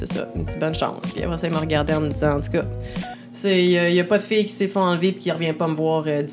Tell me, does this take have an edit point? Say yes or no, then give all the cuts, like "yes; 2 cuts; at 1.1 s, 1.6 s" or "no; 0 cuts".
no; 0 cuts